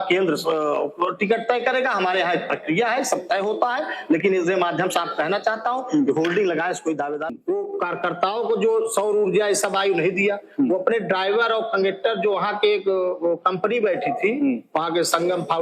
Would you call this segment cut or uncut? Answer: cut